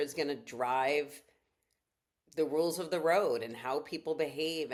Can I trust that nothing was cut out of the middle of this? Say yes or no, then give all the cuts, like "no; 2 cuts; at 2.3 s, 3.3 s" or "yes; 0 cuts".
yes; 0 cuts